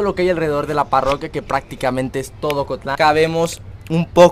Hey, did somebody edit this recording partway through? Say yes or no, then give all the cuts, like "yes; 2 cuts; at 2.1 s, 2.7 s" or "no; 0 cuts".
yes; 1 cut; at 2.9 s